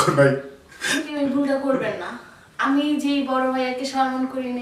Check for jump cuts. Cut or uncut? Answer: cut